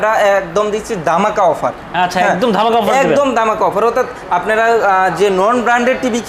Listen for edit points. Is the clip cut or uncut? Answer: uncut